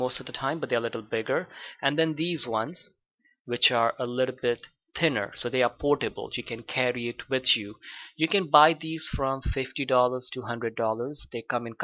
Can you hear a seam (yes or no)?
yes